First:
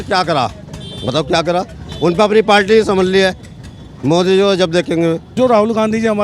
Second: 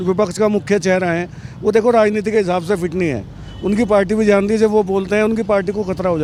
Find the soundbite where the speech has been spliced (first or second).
first